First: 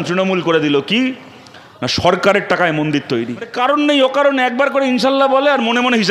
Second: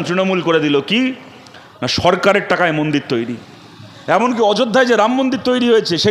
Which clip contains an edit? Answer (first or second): first